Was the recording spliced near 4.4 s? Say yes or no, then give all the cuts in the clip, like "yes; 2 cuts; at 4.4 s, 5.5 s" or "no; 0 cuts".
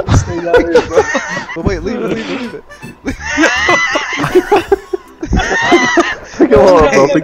no; 1 cut; at 1.6 s